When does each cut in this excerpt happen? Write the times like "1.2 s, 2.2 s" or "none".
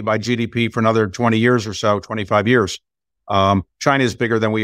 none